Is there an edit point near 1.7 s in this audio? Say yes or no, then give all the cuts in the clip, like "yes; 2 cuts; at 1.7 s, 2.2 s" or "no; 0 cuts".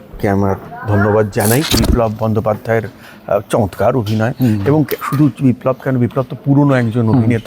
yes; 1 cut; at 1.7 s